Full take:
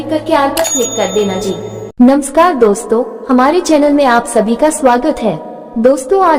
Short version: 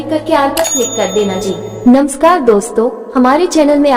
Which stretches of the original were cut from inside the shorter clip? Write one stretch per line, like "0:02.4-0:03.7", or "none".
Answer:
0:01.7-0:01.8